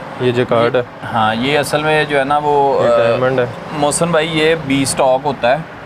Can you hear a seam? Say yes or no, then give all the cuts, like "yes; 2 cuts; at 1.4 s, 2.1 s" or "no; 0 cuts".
no; 0 cuts